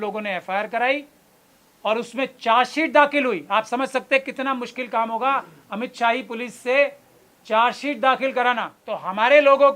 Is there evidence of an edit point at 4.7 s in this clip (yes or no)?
no